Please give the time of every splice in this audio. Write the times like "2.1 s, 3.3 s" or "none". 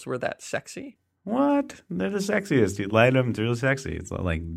0.9 s